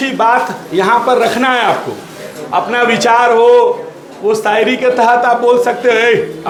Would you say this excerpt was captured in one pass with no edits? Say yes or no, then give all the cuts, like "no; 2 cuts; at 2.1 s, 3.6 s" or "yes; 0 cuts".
yes; 0 cuts